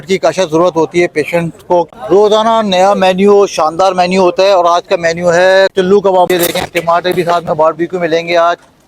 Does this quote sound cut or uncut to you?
cut